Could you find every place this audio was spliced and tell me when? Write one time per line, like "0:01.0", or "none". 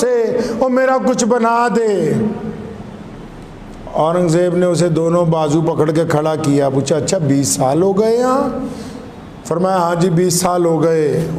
none